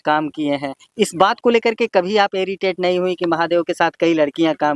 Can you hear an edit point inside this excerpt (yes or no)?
no